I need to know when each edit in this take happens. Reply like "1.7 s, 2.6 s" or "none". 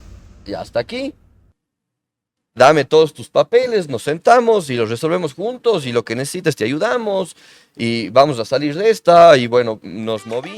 none